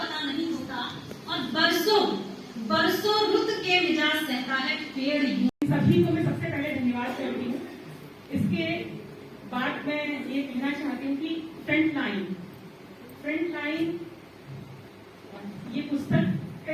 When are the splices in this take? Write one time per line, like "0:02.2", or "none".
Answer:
0:05.6